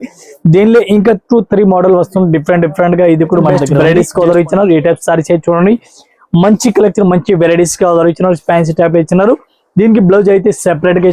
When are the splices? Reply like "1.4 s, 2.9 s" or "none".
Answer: 3.6 s